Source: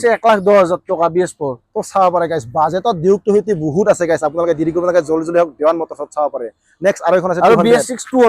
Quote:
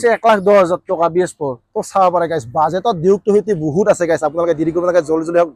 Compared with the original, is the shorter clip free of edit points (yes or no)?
yes